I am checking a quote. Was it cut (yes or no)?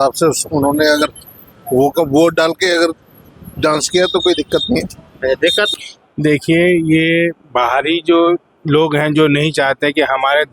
yes